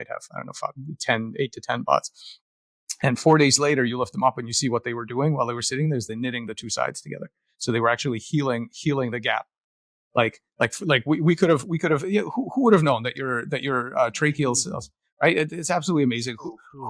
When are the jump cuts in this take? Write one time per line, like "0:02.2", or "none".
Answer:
none